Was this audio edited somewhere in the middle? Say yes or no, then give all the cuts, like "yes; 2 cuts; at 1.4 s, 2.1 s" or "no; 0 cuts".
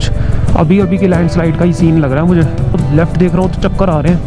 yes; 1 cut; at 2.8 s